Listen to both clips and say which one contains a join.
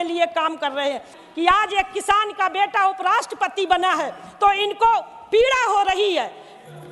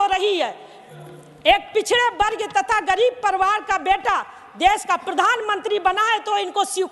first; 1 cut; at 1.2 s

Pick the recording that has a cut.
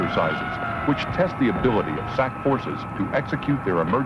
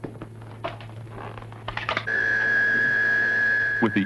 second; 1 cut; at 2.7 s

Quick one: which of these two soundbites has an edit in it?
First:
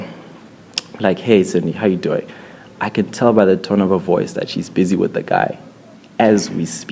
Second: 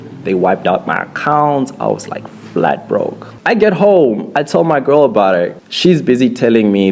second; 2 cuts; at 3.3 s, 5.5 s

